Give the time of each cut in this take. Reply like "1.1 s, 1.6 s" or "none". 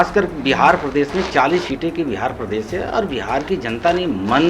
none